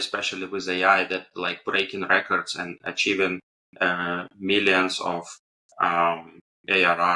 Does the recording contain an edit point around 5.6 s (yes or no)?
no